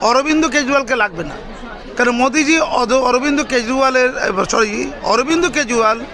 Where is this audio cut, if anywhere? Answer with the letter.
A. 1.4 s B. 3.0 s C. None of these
C